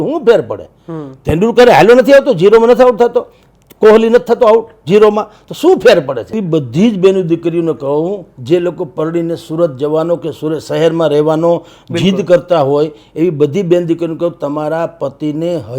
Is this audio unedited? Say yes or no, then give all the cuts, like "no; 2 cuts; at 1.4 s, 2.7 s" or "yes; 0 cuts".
no; 1 cut; at 6.4 s